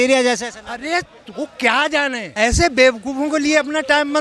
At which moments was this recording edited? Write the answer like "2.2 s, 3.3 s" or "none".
none